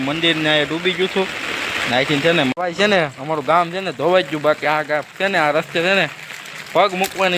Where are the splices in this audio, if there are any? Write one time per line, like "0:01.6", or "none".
0:02.5